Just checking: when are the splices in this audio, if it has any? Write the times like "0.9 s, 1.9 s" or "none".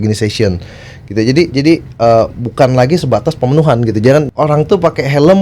4.3 s